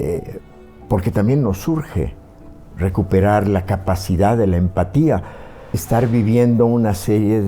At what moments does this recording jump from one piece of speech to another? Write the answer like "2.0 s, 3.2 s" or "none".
5.8 s